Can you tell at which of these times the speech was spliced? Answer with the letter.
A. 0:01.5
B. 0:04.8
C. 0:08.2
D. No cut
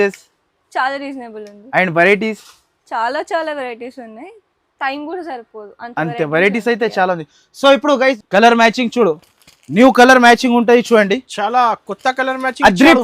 C